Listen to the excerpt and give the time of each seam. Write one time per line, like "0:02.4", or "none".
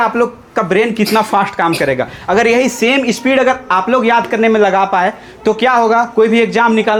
none

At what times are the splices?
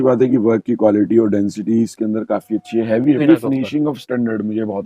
0:03.2

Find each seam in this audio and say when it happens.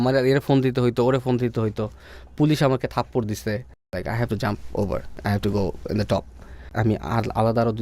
0:03.9
0:05.1
0:06.7

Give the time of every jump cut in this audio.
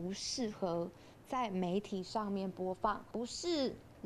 0:03.1

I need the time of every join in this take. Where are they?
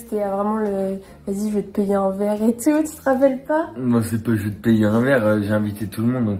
none

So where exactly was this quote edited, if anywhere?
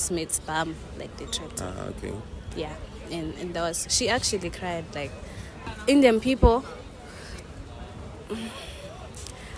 0:05.5

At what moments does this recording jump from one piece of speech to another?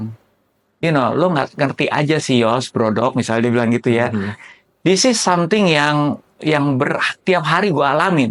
none

